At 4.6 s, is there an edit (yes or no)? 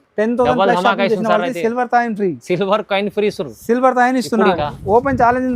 yes